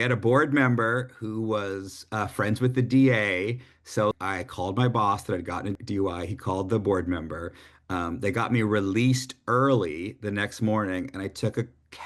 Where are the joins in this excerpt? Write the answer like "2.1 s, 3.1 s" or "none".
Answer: 4.1 s, 5.7 s